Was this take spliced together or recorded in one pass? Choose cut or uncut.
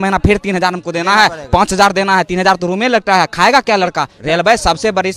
cut